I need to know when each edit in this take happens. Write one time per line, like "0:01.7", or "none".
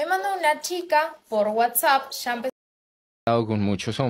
0:02.7